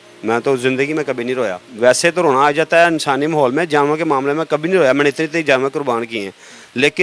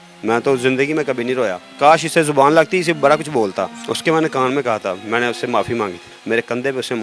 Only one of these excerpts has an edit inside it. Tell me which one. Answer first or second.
second